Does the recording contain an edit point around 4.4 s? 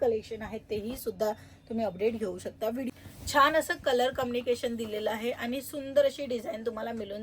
no; 1 cut; at 2.9 s

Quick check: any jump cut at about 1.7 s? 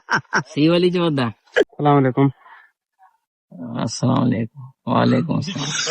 yes; 1 cut; at 1.7 s

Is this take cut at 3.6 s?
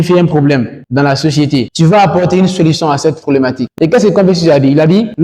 yes; 2 cuts; at 1.7 s, 3.6 s

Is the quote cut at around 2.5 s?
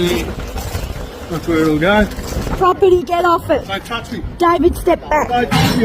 yes; 1 cut; at 2.5 s

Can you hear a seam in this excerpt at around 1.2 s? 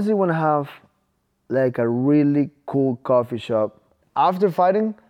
no; 1 cut; at 4.0 s

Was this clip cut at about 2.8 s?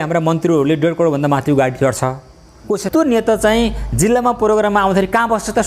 yes; 1 cut; at 2.8 s

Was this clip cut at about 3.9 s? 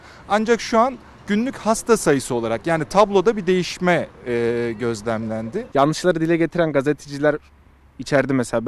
no; 1 cut; at 5.6 s

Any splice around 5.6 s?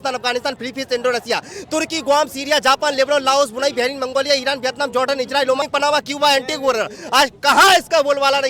yes; 1 cut; at 5.6 s

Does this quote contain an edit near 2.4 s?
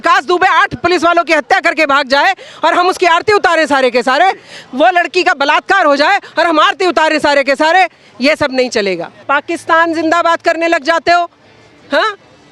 no; 1 cut; at 9.1 s

